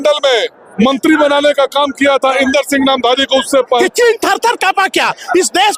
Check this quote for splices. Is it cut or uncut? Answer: cut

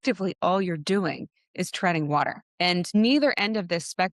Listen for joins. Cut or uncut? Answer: cut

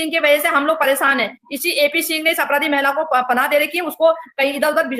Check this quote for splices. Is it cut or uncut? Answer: uncut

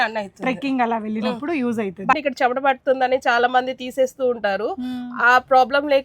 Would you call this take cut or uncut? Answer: cut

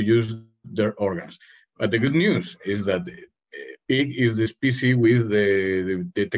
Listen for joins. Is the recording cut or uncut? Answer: uncut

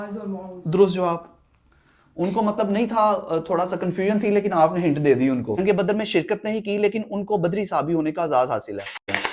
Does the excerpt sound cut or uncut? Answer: cut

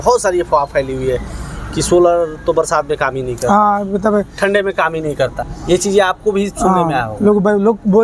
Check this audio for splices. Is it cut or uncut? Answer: cut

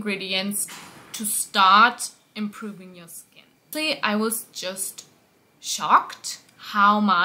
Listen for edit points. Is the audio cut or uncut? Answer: cut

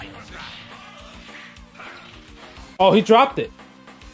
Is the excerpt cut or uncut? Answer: uncut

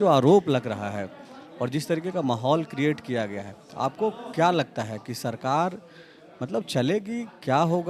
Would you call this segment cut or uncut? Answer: uncut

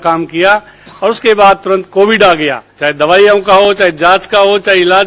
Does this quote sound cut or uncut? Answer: cut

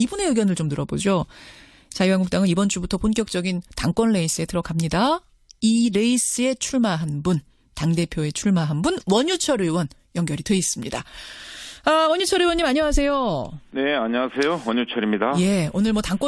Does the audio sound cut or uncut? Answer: cut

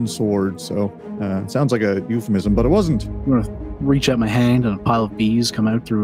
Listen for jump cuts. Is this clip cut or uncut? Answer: cut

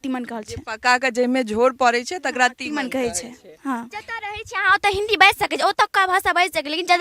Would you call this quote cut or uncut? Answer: cut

